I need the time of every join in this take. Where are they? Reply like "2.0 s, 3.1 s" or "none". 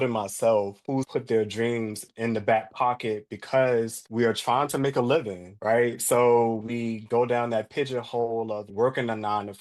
0.9 s, 2.0 s, 4.0 s

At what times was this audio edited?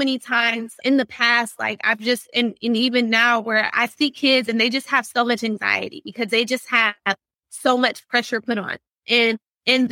none

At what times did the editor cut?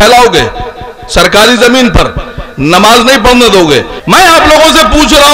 3.9 s

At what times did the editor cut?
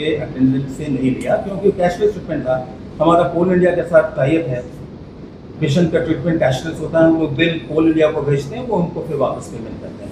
none

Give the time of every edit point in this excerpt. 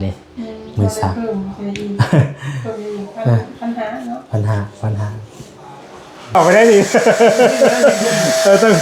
6.3 s

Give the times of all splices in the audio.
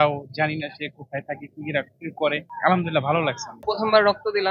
2.5 s, 3.6 s

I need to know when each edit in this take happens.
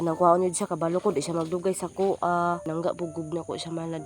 2.7 s

